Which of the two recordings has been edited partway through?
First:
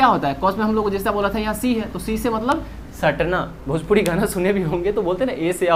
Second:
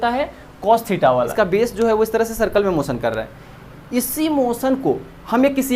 second; 1 cut; at 1.2 s

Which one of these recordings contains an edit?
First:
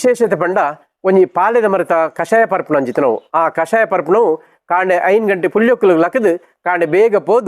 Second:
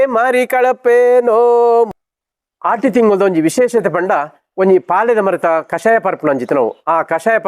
second; 1 cut; at 1.9 s

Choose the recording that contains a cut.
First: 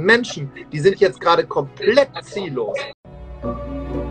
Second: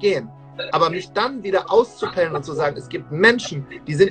first; 1 cut; at 3.0 s

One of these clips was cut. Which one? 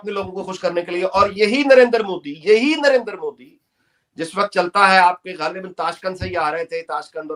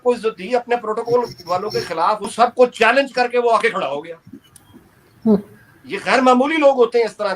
second; 1 cut; at 2.3 s

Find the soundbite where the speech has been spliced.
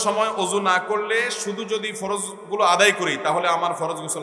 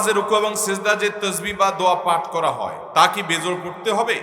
second; 1 cut; at 2.8 s

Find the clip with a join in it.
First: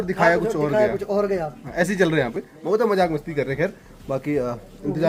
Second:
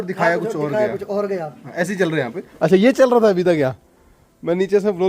second; 1 cut; at 2.4 s

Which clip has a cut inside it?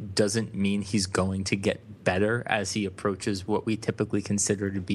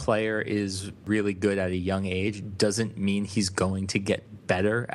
second; 1 cut; at 1.0 s

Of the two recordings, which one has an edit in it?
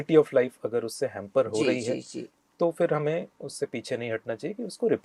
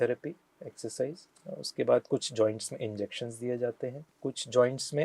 second; 2 cuts; at 1.3 s, 4.1 s

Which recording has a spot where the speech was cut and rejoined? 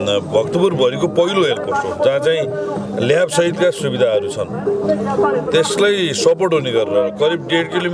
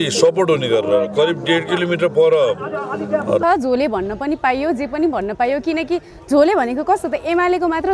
second; 1 cut; at 3.4 s

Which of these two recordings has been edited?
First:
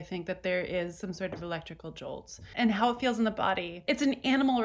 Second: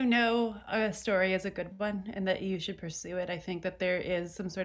first; 2 cuts; at 2.5 s, 3.8 s

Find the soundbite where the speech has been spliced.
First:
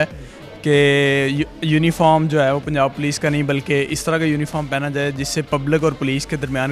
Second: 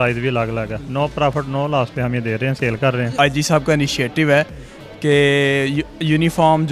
second; 1 cut; at 3.1 s

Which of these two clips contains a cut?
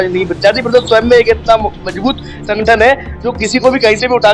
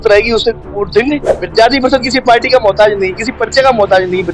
second; 1 cut; at 1.3 s

